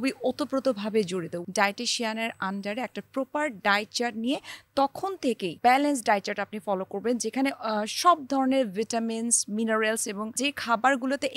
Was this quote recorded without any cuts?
no; 3 cuts; at 1.3 s, 5.6 s, 10.4 s

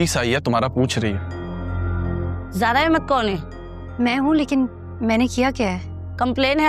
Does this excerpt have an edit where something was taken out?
yes; 1 cut; at 2.4 s

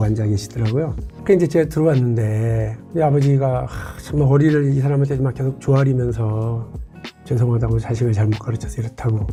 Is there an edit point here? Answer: no; 0 cuts

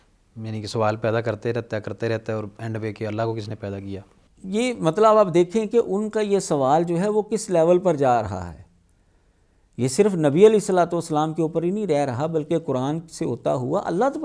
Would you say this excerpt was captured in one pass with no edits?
yes; 0 cuts

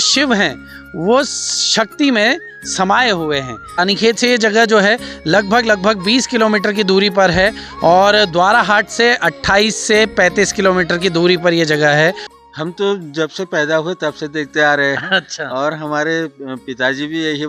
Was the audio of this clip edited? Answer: yes; 2 cuts; at 3.8 s, 12.3 s

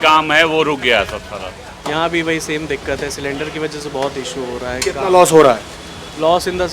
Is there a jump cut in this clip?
yes; 1 cut; at 1.7 s

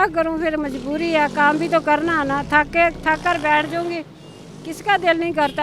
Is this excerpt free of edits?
yes; 0 cuts

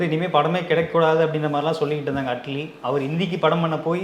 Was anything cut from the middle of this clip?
no; 0 cuts

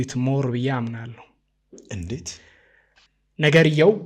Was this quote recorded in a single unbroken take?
yes; 0 cuts

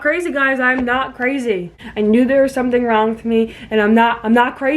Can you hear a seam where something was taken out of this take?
yes; 1 cut; at 1.8 s

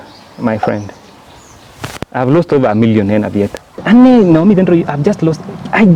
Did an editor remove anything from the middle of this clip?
yes; 1 cut; at 3.8 s

